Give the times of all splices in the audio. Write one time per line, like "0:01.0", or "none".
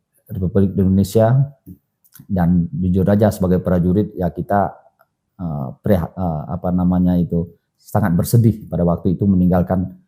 none